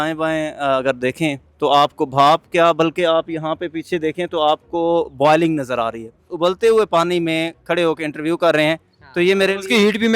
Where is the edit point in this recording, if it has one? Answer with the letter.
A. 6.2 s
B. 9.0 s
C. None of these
A